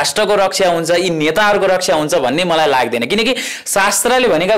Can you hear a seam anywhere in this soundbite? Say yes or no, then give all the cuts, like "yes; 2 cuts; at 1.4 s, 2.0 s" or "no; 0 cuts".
no; 0 cuts